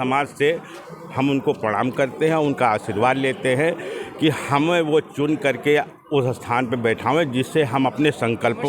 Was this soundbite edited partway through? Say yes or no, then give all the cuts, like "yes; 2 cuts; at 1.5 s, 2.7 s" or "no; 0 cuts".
no; 0 cuts